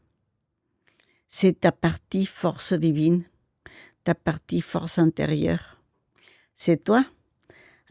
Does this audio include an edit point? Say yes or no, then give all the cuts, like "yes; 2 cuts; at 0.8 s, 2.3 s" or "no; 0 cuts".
no; 0 cuts